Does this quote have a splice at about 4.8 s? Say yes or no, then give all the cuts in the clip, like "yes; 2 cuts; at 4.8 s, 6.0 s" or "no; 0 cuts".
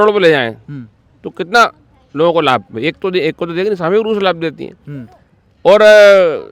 no; 0 cuts